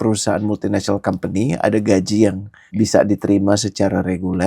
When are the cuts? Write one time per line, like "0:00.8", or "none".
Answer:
none